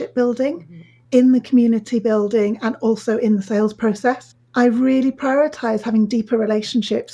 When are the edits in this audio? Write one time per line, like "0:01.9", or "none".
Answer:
0:04.3